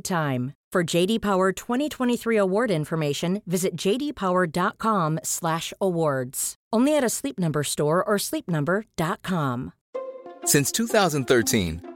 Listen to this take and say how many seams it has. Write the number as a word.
one